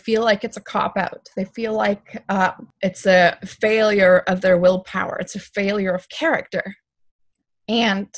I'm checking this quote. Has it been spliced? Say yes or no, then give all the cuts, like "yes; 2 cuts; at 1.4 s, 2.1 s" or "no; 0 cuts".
yes; 1 cut; at 2.7 s